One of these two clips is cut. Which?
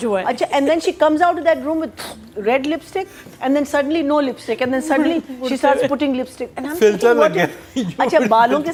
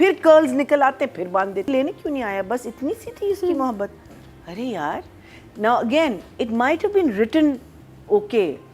second; 1 cut; at 1.7 s

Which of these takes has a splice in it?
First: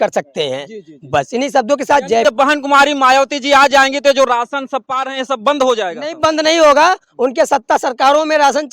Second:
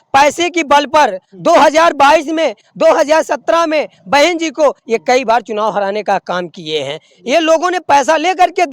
first; 1 cut; at 2.2 s

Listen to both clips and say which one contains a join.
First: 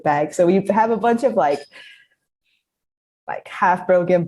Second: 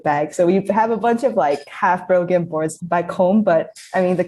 second; 2 cuts; at 1.7 s, 2.8 s

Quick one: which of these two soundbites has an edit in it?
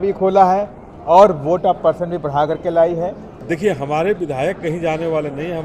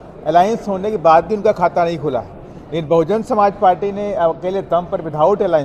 first; 1 cut; at 3.3 s

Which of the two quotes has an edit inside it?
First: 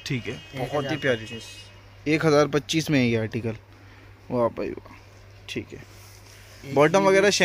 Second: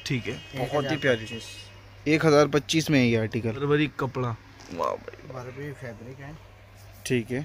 second; 1 cut; at 3.6 s

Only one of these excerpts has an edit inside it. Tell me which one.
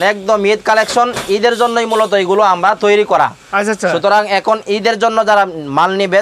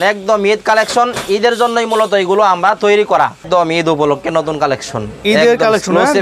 second; 1 cut; at 3.4 s

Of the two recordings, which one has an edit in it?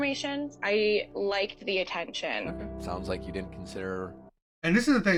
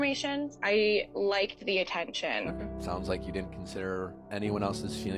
second; 1 cut; at 4.2 s

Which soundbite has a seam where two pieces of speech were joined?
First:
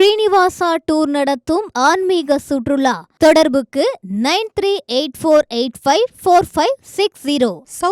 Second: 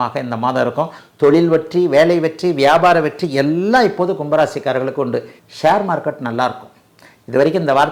second; 2 cuts; at 1.0 s, 5.4 s

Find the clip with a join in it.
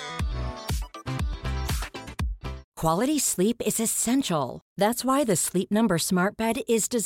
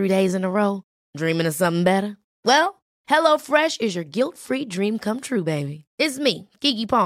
first; 1 cut; at 2.6 s

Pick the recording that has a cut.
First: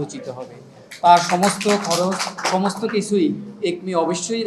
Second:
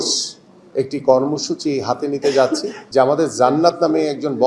second; 1 cut; at 2.8 s

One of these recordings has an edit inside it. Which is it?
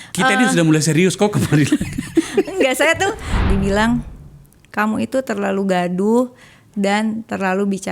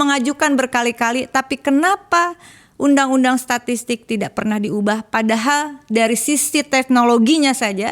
first; 1 cut; at 3.3 s

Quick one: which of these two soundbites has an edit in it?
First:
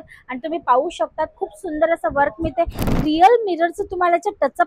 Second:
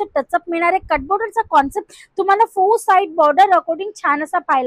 first; 1 cut; at 2.9 s

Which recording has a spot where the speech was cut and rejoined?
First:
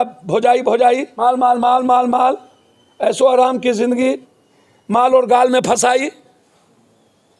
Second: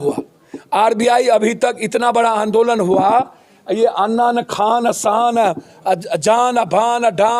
first; 2 cuts; at 1.1 s, 4.2 s

